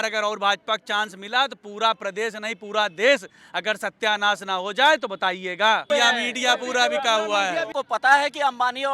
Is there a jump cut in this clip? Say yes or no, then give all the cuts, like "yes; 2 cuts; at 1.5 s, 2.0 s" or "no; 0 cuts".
yes; 2 cuts; at 5.9 s, 7.7 s